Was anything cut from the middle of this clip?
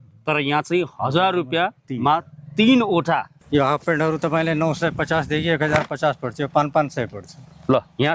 yes; 1 cut; at 3.3 s

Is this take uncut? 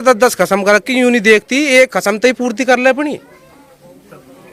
yes; 0 cuts

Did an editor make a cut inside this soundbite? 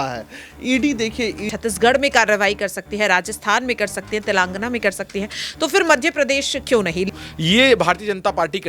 yes; 2 cuts; at 1.5 s, 7.1 s

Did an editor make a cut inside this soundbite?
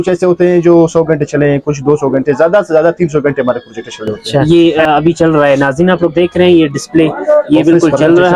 yes; 1 cut; at 4.4 s

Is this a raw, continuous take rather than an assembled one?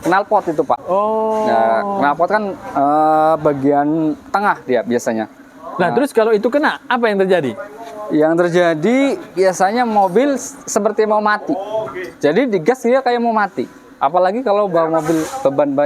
yes; 0 cuts

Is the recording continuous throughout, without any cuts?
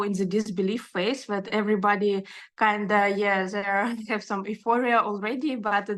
yes; 0 cuts

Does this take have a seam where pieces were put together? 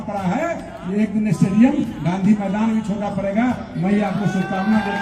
no; 0 cuts

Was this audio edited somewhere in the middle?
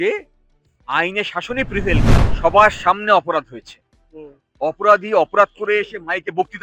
yes; 1 cut; at 2.2 s

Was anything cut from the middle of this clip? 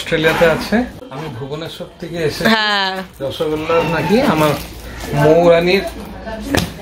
yes; 1 cut; at 1.0 s

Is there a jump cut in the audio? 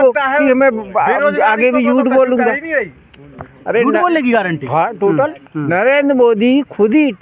no; 0 cuts

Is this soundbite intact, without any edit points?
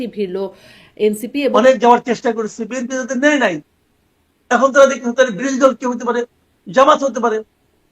no; 1 cut; at 1.5 s

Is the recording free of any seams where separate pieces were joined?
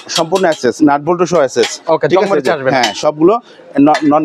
yes; 0 cuts

